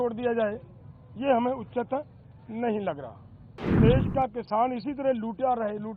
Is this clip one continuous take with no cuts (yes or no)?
no